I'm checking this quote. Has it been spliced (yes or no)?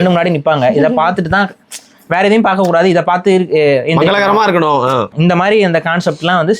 yes